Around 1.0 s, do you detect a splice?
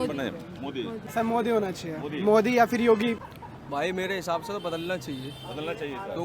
yes; 2 cuts; at 1.0 s, 3.3 s

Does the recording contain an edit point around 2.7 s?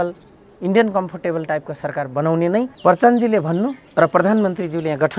yes; 2 cuts; at 2.7 s, 3.8 s

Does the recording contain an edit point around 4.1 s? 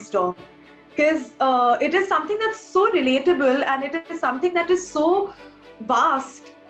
no; 0 cuts

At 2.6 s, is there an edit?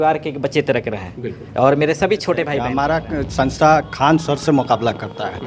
yes; 1 cut; at 2.6 s

